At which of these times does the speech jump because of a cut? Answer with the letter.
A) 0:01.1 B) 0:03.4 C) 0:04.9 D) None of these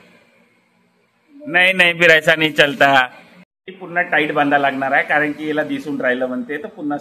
D